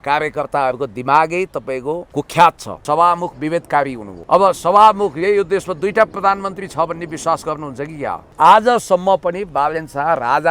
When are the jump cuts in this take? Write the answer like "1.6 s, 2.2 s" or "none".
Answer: 2.0 s, 2.8 s, 4.1 s, 8.3 s